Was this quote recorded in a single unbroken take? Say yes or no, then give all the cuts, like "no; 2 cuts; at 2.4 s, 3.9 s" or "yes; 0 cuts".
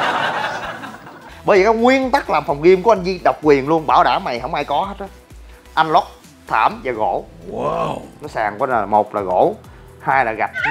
no; 2 cuts; at 1.3 s, 8.0 s